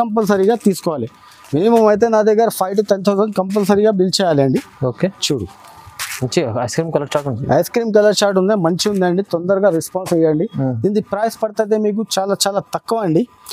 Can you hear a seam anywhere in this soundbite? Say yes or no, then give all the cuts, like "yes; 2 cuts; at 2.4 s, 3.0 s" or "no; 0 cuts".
no; 0 cuts